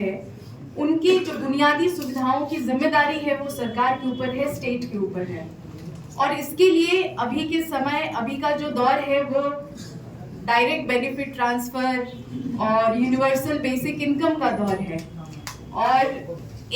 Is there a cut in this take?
no; 0 cuts

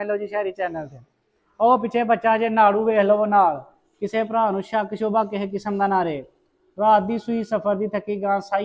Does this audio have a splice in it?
no; 0 cuts

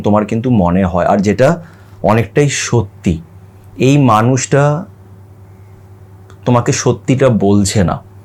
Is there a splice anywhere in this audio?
no; 0 cuts

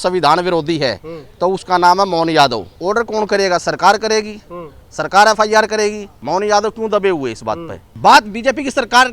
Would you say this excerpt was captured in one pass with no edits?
no; 3 cuts; at 2.7 s, 6.1 s, 7.9 s

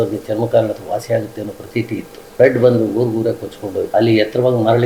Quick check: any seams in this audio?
yes; 2 cuts; at 2.3 s, 3.9 s

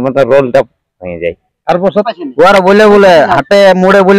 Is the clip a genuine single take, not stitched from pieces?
no; 1 cut; at 1.9 s

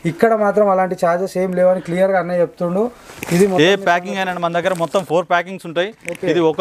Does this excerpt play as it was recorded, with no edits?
yes; 0 cuts

